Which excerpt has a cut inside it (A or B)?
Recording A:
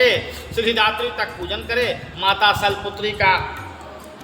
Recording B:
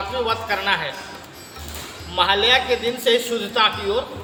A